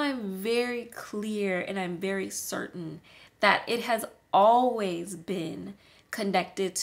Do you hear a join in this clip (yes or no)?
no